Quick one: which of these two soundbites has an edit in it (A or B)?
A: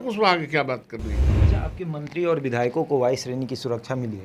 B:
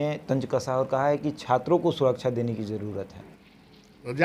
A